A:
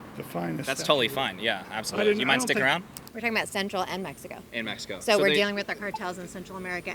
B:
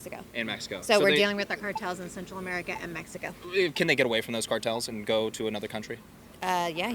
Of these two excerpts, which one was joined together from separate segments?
A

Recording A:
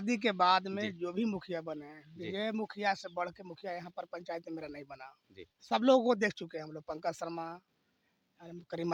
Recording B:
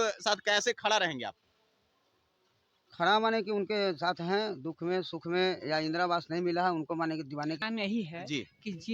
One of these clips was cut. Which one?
B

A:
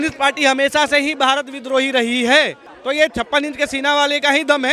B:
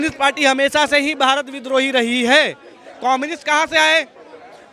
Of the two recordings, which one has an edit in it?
A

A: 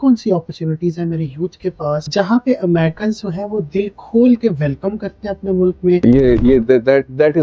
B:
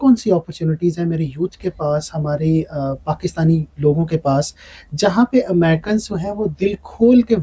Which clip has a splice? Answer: A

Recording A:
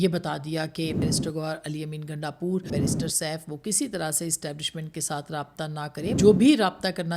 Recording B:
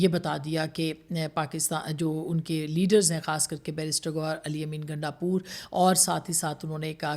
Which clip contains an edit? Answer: A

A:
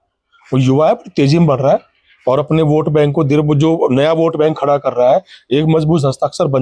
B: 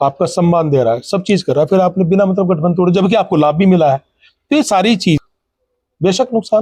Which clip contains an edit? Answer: B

